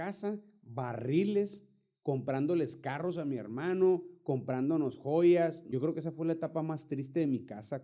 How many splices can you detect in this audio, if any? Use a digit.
1